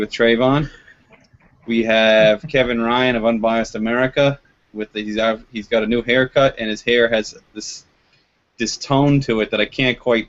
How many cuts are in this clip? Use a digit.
0